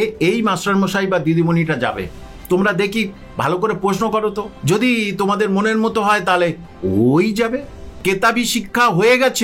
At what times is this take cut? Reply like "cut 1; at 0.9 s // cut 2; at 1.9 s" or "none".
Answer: cut 1; at 4.5 s // cut 2; at 8.0 s